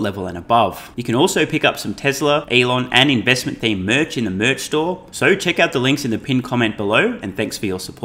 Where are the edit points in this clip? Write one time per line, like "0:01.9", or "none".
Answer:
0:00.9
0:02.5
0:05.1